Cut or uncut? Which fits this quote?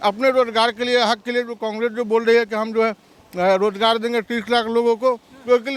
uncut